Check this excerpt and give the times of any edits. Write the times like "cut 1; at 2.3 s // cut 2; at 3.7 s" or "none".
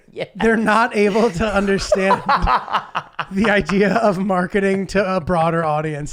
none